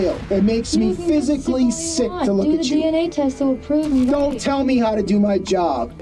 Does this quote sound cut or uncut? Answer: uncut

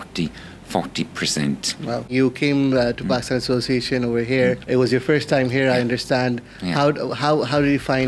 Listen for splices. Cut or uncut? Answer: cut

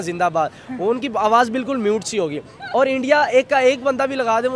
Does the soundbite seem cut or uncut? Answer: uncut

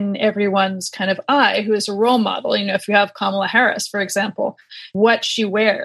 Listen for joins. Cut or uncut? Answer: cut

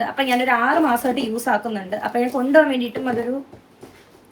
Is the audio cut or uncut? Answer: uncut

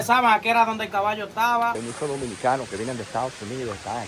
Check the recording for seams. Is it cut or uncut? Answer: cut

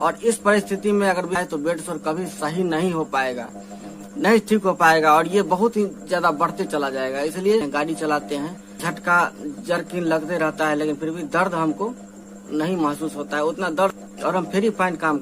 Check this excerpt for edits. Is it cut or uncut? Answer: cut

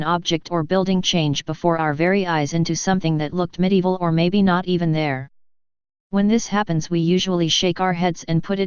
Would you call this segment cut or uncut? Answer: uncut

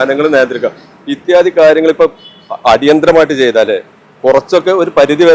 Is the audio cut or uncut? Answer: uncut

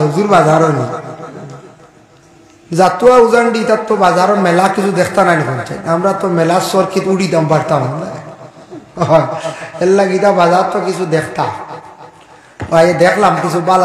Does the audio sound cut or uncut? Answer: uncut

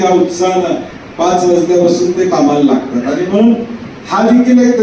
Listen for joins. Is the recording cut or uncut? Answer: uncut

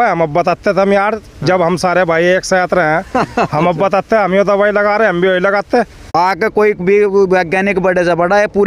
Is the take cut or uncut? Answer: cut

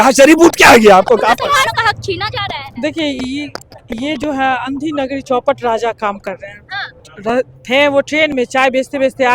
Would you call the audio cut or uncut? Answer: cut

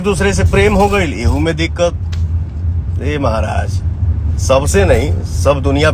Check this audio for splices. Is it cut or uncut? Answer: uncut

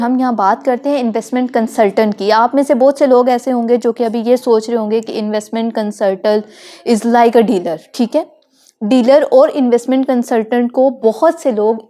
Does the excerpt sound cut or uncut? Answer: uncut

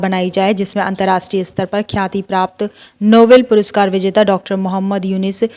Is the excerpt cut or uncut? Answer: uncut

